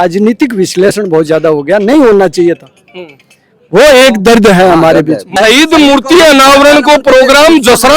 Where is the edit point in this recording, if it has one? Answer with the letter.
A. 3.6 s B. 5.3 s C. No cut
B